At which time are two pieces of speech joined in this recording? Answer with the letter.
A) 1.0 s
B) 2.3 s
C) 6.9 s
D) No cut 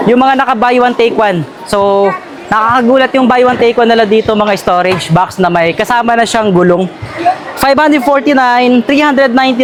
D